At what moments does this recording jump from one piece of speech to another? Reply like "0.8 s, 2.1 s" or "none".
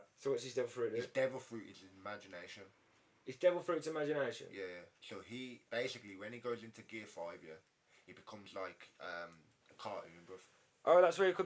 none